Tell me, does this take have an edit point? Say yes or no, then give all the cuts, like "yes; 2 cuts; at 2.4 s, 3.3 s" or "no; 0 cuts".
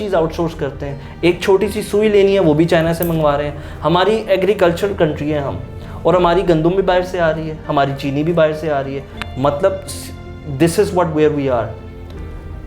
no; 0 cuts